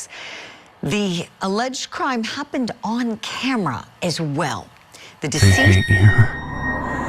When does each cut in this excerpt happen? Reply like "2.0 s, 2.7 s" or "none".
5.7 s